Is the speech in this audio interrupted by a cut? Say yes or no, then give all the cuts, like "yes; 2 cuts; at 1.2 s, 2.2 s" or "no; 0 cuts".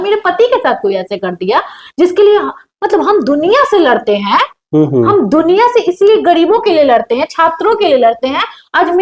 no; 0 cuts